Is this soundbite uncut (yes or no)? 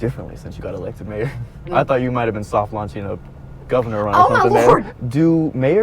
no